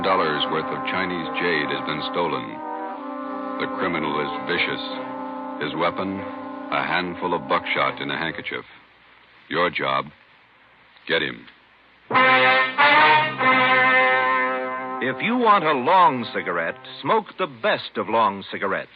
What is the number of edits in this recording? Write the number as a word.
one